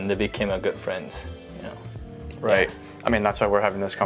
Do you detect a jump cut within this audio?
no; 0 cuts

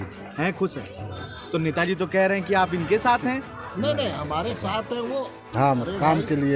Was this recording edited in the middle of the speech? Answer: no; 0 cuts

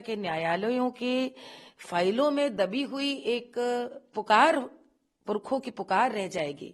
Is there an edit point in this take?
no; 0 cuts

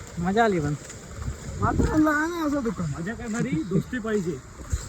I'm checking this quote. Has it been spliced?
no; 0 cuts

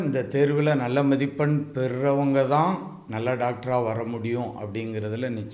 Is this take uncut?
yes; 0 cuts

